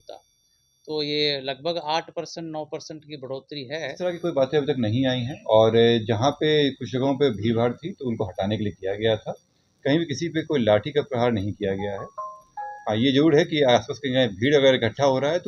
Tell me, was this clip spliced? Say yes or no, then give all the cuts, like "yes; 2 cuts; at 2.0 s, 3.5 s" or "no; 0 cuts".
yes; 1 cut; at 4.0 s